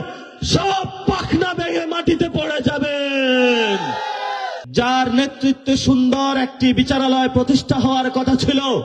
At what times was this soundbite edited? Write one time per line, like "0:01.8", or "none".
0:04.6